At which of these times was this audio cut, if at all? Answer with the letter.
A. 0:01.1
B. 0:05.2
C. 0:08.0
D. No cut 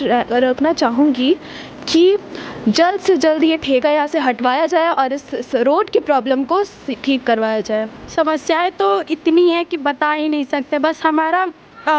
C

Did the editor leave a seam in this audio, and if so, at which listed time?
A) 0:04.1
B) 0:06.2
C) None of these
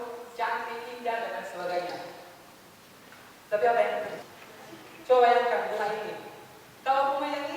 A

